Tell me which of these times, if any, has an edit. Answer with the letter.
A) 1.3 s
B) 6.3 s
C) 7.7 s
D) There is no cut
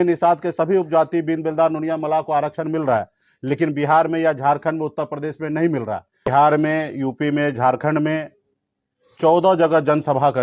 B